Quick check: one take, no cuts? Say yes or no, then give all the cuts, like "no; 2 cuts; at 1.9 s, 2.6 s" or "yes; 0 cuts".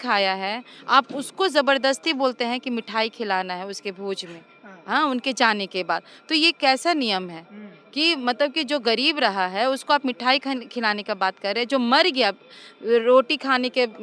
yes; 0 cuts